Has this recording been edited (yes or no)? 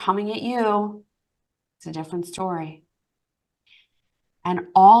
no